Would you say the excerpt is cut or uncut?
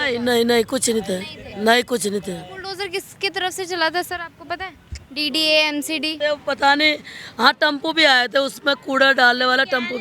uncut